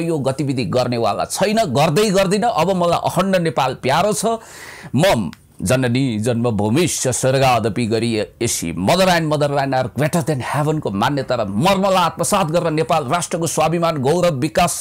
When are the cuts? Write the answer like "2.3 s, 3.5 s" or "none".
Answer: none